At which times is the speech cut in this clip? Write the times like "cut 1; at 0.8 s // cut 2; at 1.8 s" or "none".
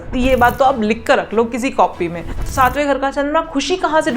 cut 1; at 2.4 s